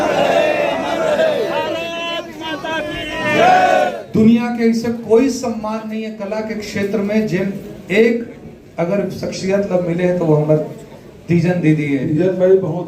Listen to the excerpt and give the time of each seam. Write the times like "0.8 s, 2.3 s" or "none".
4.0 s, 12.2 s